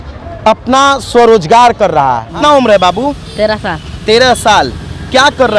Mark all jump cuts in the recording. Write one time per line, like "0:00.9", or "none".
0:02.3